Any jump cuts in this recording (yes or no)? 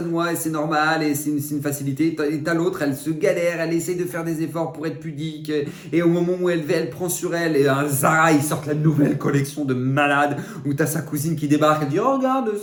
no